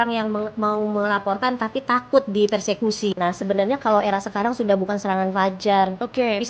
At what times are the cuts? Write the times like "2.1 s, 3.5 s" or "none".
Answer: 3.2 s